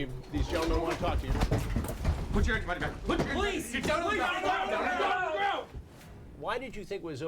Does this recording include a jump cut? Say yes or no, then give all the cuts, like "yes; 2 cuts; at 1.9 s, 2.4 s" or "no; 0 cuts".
yes; 2 cuts; at 1.9 s, 5.8 s